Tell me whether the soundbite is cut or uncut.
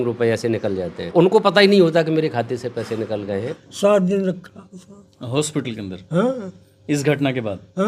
cut